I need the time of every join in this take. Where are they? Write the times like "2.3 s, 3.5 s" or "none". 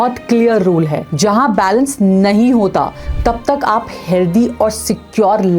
3.1 s